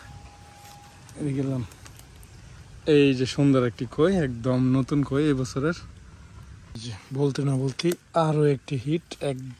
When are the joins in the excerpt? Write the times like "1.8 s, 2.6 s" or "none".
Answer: 6.8 s